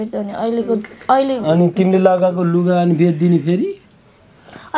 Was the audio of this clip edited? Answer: no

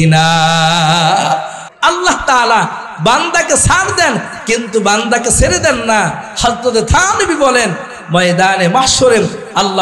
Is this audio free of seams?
no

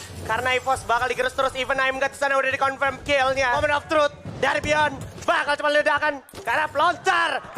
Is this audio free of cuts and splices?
no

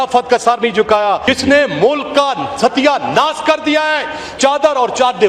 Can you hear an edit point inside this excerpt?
yes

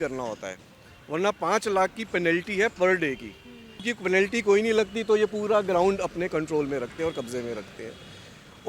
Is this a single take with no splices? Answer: no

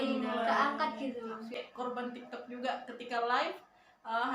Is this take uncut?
no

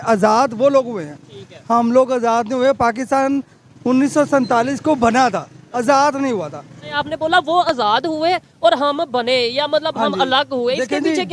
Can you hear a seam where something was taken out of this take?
yes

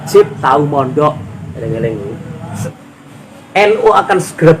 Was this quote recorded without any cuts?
no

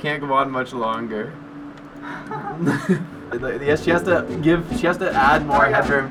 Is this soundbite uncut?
yes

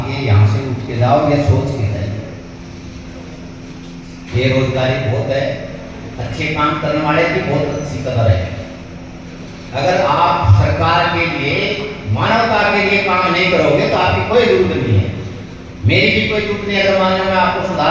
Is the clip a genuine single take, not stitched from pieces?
yes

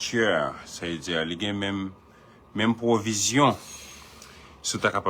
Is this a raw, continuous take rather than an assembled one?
yes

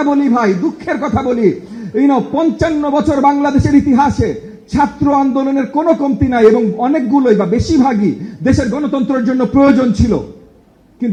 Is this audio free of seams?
yes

